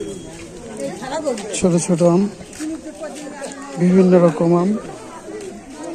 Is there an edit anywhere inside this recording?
no; 0 cuts

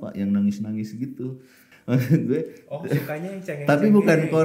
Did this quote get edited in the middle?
no; 0 cuts

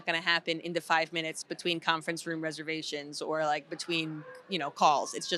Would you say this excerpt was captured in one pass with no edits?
yes; 0 cuts

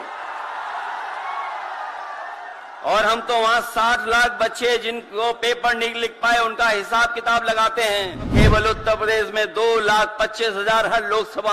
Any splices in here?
yes; 1 cut; at 8.3 s

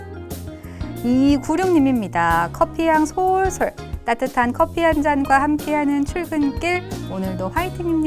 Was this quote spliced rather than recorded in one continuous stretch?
yes; 1 cut; at 1.0 s

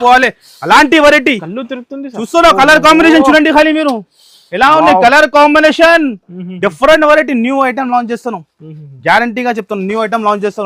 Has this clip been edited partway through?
no; 0 cuts

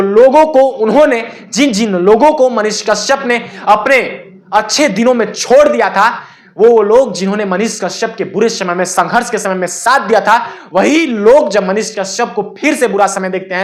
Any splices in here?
no; 0 cuts

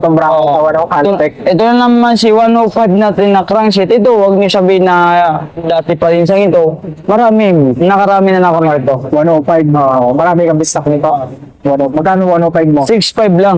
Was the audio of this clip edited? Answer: no; 0 cuts

